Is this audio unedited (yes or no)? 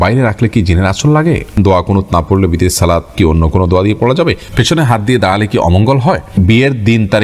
no